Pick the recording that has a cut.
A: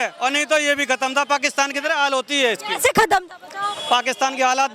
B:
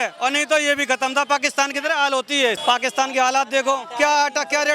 B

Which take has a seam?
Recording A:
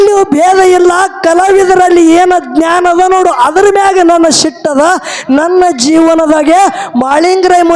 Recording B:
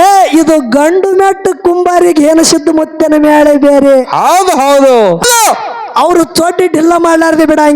B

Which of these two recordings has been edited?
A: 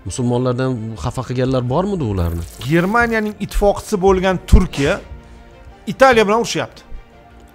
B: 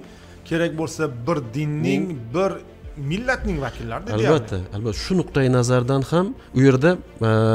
A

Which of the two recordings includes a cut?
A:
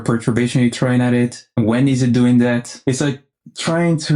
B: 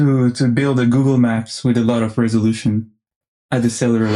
A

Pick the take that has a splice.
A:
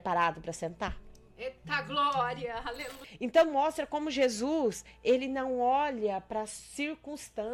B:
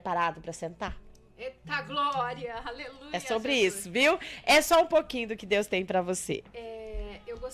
A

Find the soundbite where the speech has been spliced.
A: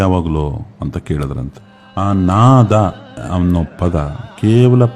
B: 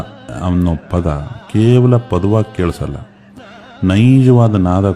A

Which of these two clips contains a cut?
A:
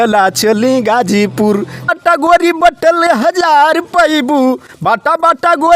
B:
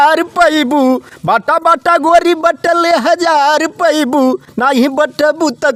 A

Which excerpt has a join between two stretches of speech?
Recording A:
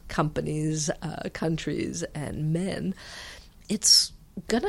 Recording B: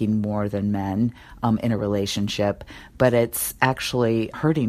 A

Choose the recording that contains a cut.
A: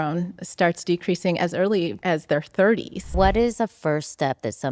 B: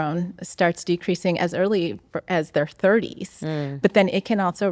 A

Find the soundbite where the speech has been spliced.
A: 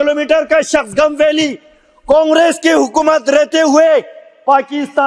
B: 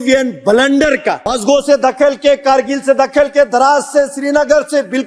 B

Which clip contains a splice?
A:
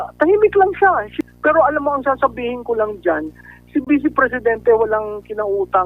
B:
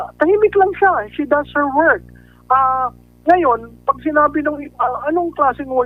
A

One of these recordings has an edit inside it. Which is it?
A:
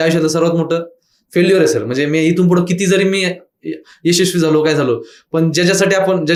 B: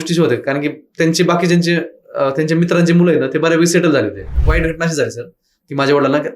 B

